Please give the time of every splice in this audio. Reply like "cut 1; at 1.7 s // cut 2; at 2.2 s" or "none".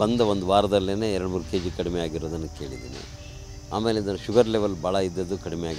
none